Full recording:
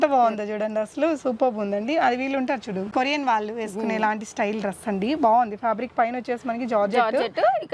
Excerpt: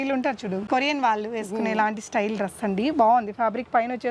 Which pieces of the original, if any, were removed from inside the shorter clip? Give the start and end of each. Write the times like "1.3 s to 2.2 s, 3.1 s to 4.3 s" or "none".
none